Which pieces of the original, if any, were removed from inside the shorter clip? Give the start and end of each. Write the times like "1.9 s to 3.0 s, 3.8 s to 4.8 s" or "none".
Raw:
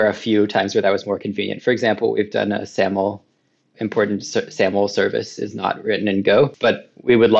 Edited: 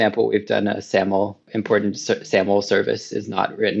3.3 s to 3.7 s